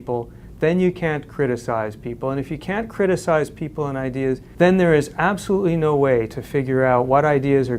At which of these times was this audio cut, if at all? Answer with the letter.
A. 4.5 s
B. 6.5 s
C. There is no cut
A